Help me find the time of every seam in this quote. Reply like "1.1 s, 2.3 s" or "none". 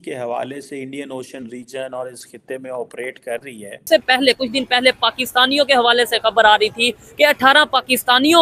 3.8 s